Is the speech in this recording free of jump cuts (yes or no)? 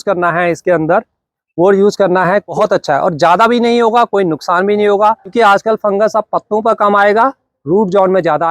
no